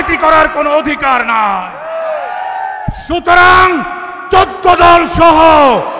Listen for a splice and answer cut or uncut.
uncut